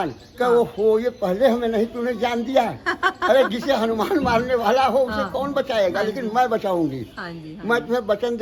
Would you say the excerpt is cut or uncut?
uncut